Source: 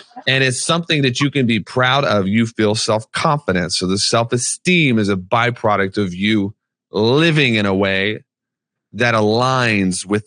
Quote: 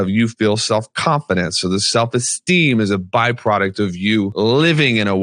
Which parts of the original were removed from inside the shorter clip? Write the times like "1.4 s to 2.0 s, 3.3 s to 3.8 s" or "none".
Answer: 6.5 s to 6.9 s